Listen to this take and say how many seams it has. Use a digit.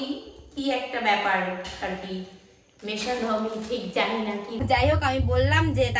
1